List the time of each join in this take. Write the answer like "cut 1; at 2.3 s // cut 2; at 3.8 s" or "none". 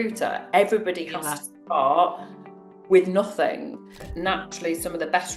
cut 1; at 4.1 s